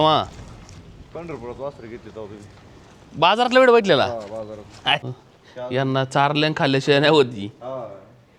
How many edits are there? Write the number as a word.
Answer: one